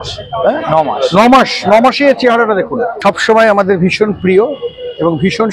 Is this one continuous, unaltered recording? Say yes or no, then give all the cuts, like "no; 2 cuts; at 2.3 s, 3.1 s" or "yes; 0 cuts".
no; 1 cut; at 2.9 s